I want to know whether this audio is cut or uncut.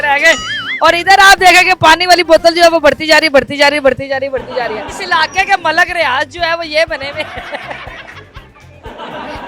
cut